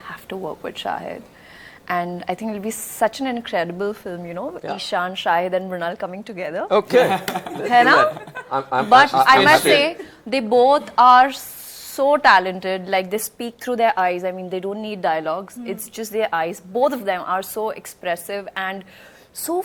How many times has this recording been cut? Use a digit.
0